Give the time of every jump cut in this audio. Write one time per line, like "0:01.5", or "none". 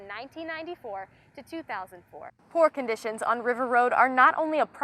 0:02.3